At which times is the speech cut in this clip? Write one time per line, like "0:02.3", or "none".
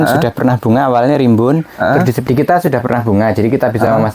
0:02.2